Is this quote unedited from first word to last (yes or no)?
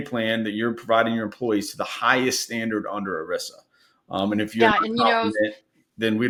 yes